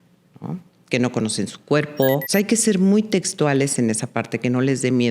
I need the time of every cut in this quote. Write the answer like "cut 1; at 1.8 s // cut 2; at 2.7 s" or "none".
cut 1; at 2.2 s